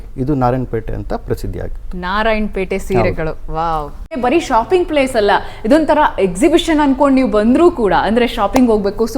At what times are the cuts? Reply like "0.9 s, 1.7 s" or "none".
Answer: 4.1 s